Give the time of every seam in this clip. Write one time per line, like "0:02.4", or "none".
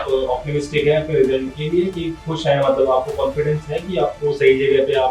none